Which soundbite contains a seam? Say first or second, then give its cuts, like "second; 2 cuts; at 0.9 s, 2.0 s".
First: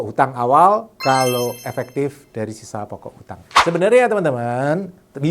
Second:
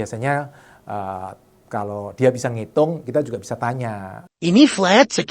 first; 1 cut; at 3.5 s